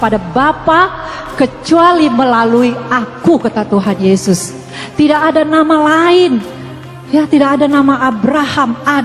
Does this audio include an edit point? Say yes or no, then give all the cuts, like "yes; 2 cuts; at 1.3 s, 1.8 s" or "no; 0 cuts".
no; 0 cuts